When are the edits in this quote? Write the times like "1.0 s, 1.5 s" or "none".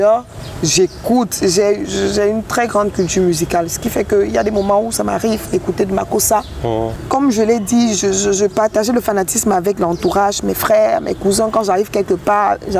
7.0 s